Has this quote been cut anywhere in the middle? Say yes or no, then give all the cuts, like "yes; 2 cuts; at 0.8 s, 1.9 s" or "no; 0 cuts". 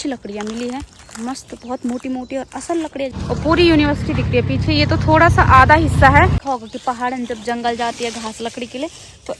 yes; 2 cuts; at 3.2 s, 6.4 s